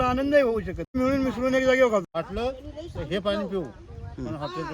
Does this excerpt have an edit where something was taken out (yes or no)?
yes